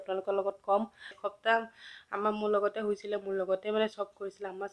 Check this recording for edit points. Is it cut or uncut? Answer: cut